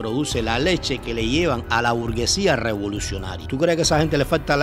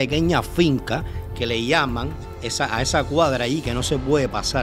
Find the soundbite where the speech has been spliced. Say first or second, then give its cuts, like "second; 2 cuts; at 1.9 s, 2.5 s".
first; 1 cut; at 3.4 s